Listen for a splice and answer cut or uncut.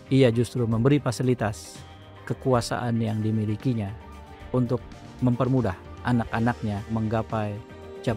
cut